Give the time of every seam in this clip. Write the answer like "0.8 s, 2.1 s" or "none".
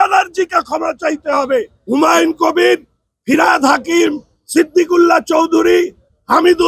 1.8 s